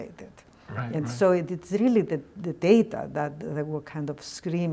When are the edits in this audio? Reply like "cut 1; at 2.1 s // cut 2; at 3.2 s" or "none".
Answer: none